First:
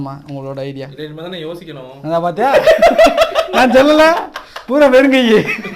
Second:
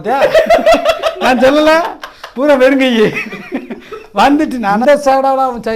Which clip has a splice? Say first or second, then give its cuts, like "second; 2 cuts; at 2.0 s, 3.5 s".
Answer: second; 1 cut; at 4.8 s